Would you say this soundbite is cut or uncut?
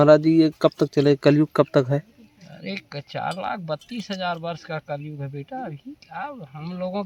uncut